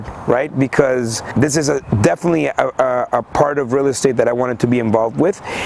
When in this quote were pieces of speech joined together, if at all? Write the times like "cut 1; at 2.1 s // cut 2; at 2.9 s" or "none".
cut 1; at 1.2 s

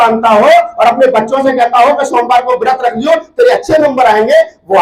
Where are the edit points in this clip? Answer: none

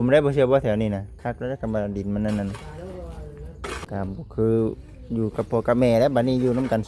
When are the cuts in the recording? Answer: cut 1; at 3.8 s

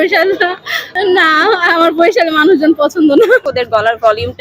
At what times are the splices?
cut 1; at 0.9 s // cut 2; at 3.4 s

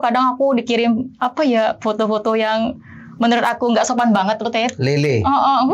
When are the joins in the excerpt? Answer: none

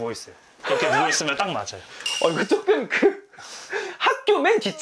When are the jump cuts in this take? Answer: none

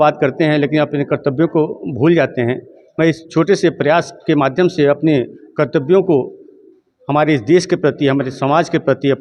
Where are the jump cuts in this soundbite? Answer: none

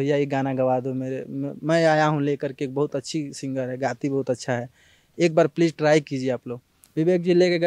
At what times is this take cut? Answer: cut 1; at 6.8 s

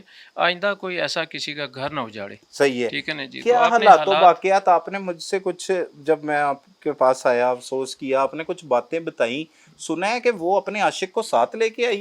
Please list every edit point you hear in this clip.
none

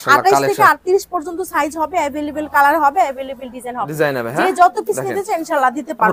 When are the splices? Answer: none

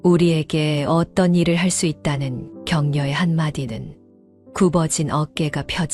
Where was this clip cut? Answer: none

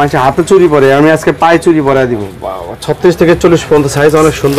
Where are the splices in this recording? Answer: cut 1; at 2.2 s

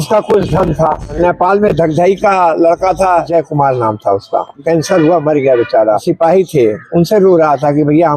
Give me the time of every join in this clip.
cut 1; at 1.2 s // cut 2; at 3.3 s // cut 3; at 4.6 s // cut 4; at 6.1 s

